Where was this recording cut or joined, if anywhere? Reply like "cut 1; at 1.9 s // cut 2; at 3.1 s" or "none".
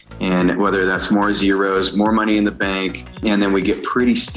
cut 1; at 3.2 s